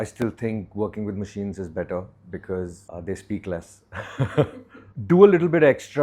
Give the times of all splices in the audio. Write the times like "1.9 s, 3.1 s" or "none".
2.9 s, 4.9 s